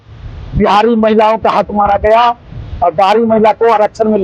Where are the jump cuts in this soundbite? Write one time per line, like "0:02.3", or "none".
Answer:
none